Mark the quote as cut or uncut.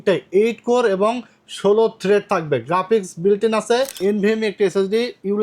cut